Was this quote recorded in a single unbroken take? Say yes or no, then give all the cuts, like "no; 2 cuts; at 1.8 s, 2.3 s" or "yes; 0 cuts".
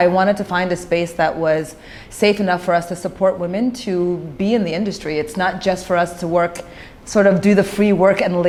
yes; 0 cuts